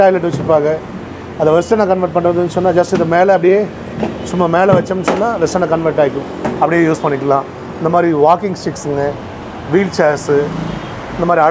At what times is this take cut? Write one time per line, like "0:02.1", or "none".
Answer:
none